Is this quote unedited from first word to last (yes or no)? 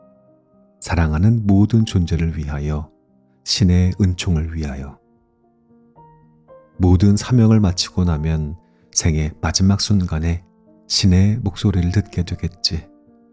yes